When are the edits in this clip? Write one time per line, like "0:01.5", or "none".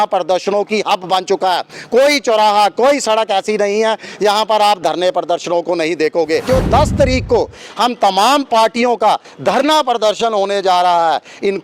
0:06.5